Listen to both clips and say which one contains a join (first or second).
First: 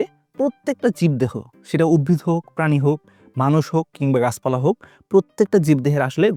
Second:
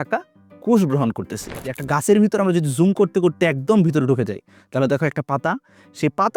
second